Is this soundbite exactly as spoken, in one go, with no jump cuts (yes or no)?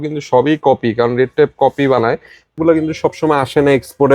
no